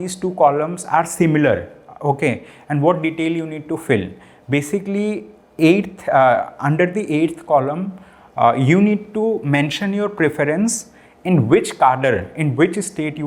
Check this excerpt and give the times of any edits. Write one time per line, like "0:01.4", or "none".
none

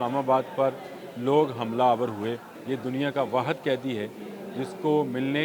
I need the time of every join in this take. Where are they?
0:02.5

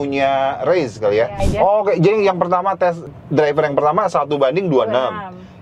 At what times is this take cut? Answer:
0:01.4
0:03.1

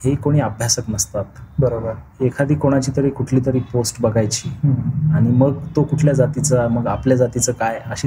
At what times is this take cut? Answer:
none

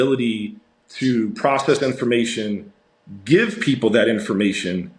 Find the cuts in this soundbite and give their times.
none

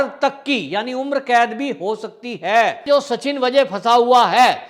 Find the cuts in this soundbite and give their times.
0:02.9

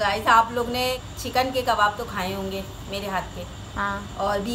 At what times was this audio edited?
0:01.1

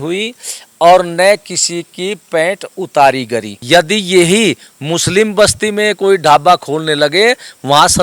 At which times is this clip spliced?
0:03.5

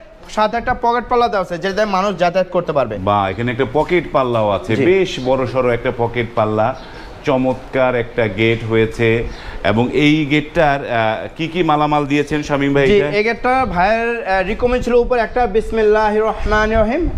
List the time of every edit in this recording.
none

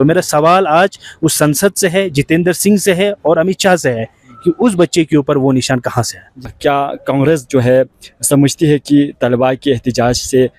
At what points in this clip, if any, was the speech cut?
none

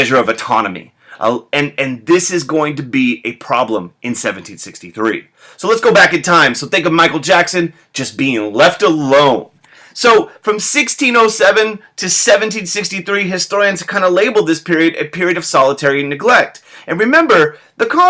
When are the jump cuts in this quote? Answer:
0:01.0
0:16.9

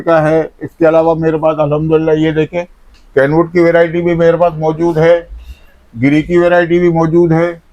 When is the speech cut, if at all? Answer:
none

